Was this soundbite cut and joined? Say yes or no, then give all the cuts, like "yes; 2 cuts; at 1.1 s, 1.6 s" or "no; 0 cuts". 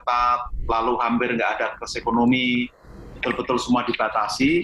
no; 0 cuts